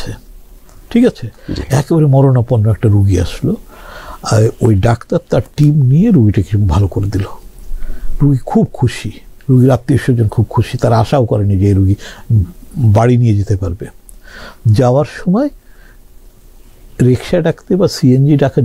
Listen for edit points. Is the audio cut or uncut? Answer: uncut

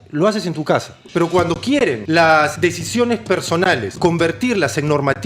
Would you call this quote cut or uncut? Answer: cut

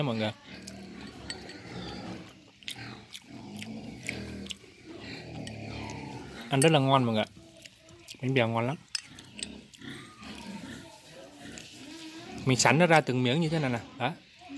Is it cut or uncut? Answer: uncut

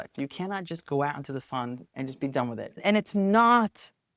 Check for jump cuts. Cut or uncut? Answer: cut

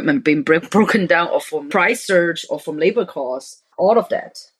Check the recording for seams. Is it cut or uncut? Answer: cut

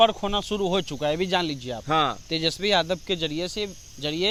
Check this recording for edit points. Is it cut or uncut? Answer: uncut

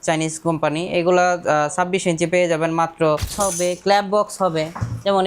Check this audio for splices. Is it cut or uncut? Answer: cut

